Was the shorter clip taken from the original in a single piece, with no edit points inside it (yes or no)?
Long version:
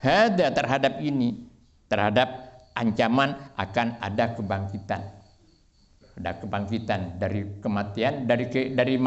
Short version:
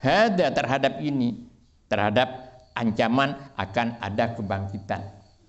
yes